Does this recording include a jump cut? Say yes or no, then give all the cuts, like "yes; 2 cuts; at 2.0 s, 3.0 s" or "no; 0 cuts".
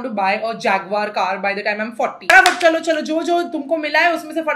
yes; 1 cut; at 2.3 s